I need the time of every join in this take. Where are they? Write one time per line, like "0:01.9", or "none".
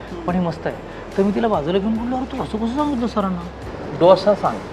0:03.6